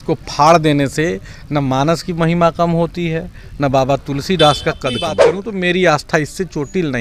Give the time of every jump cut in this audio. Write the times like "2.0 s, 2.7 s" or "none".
5.3 s

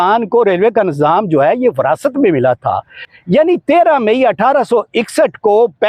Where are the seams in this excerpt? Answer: 3.1 s

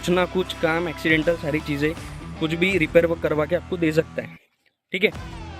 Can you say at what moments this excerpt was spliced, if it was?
none

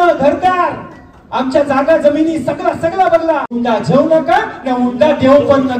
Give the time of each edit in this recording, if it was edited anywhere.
3.5 s

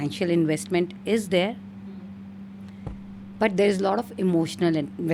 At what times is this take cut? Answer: none

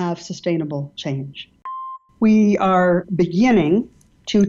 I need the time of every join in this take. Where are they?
1.8 s

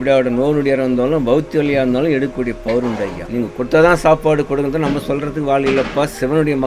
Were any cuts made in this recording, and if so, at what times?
3.2 s

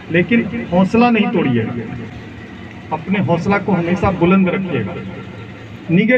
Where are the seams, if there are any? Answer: none

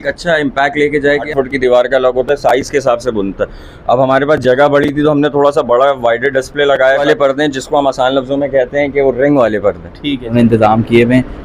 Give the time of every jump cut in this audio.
1.3 s, 7.0 s, 10.3 s

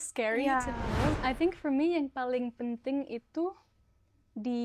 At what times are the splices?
1.2 s

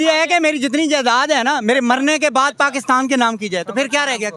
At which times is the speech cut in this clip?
none

